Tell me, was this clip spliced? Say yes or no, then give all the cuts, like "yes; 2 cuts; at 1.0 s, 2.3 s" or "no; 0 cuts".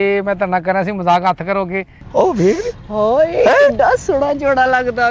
yes; 1 cut; at 2.0 s